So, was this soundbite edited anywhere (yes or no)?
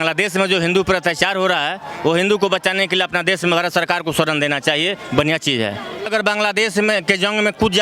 yes